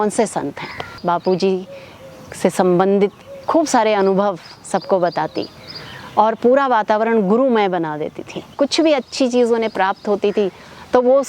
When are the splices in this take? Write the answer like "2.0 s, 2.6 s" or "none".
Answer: 1.0 s, 8.5 s